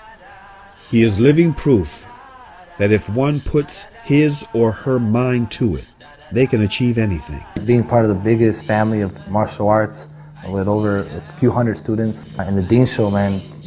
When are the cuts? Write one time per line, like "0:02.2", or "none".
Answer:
0:07.5
0:12.3